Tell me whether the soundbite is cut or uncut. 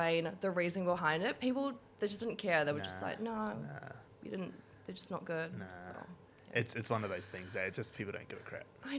uncut